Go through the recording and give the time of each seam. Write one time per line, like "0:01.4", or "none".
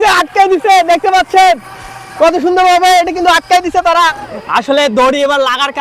0:04.2